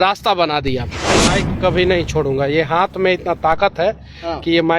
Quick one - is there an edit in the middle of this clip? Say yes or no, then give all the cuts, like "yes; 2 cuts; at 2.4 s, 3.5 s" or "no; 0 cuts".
yes; 1 cut; at 1.1 s